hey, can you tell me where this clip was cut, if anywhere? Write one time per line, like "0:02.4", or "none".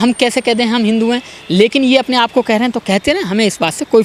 none